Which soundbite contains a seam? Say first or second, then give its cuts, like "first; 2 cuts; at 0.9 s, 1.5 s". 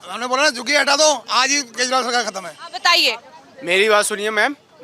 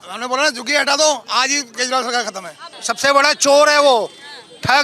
second; 1 cut; at 2.7 s